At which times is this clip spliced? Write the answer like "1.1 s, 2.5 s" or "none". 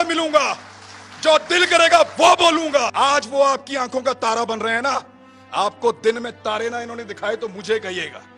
2.9 s